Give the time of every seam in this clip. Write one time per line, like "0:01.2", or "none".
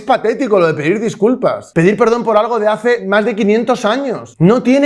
0:01.6
0:03.0